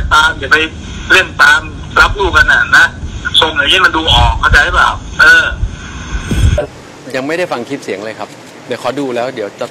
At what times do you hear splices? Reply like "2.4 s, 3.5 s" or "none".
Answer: 6.6 s